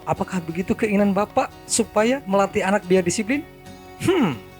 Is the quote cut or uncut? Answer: uncut